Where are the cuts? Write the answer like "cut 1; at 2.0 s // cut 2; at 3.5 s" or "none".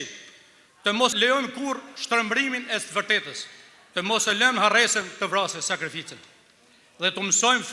cut 1; at 1.1 s